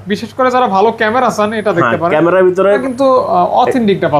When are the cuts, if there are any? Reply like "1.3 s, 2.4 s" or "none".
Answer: 2.8 s